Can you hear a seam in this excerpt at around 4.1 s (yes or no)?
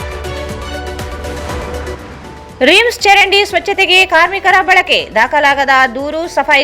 no